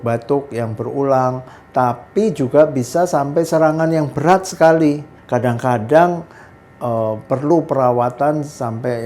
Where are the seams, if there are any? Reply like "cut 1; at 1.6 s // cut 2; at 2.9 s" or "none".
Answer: cut 1; at 5.1 s